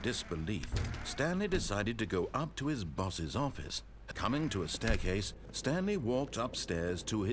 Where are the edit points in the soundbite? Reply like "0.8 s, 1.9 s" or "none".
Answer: 4.0 s